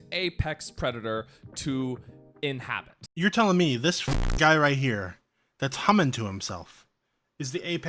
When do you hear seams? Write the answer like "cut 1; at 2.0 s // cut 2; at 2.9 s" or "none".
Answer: cut 1; at 3.0 s